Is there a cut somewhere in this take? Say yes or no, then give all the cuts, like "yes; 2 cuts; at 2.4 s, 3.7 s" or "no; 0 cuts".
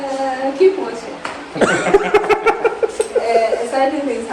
no; 0 cuts